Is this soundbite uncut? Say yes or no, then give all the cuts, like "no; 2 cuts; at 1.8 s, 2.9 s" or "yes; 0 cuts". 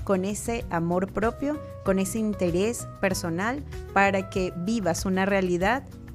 yes; 0 cuts